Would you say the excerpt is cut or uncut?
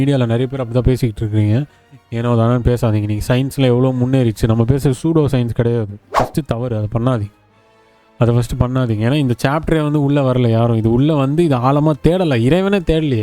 cut